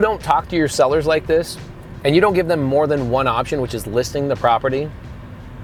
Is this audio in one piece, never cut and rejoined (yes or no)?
yes